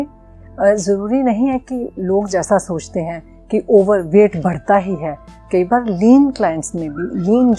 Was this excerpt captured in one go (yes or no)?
yes